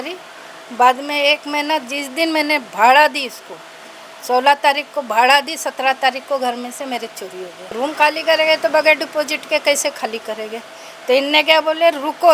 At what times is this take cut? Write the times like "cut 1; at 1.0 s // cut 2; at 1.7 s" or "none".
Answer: cut 1; at 7.7 s